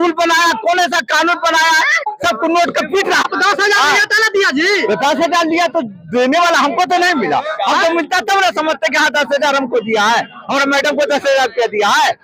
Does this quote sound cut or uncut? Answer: cut